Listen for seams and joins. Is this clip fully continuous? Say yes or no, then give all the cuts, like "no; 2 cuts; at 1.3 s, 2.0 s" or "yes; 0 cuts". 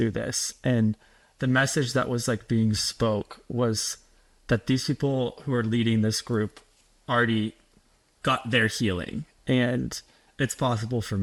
yes; 0 cuts